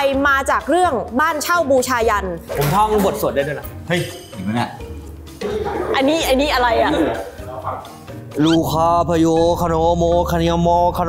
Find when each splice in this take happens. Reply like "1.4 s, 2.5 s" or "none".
2.4 s